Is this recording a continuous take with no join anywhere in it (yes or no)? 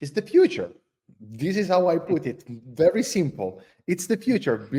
yes